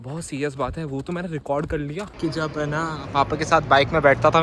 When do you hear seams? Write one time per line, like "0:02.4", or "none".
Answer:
0:02.1